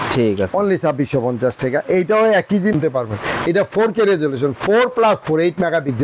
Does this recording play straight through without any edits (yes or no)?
no